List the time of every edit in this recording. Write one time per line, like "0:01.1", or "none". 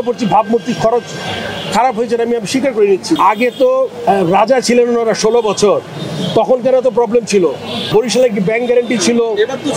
0:03.2
0:07.7